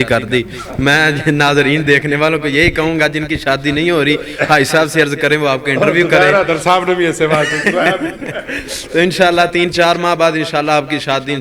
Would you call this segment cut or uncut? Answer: uncut